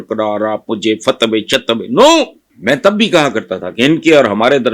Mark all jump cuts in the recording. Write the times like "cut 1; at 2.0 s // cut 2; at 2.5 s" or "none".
cut 1; at 2.5 s